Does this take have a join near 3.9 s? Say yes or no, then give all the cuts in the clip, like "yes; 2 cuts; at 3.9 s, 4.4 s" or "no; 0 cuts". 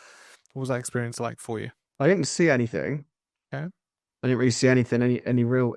no; 1 cut; at 1.8 s